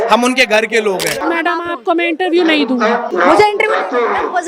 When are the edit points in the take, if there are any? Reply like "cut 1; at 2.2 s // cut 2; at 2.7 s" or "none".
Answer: cut 1; at 1.2 s // cut 2; at 3.1 s